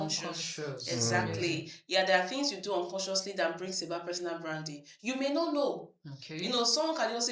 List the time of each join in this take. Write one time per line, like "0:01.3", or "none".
none